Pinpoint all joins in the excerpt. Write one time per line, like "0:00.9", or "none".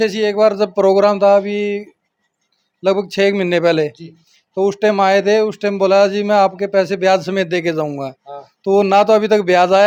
none